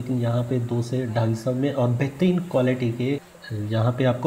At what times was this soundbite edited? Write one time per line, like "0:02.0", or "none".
0:03.3